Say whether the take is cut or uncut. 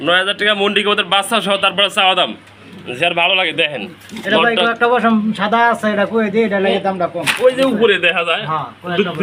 uncut